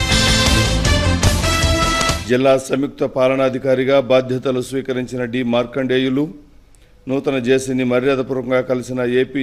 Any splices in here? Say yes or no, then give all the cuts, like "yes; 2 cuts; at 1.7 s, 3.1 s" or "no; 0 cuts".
no; 0 cuts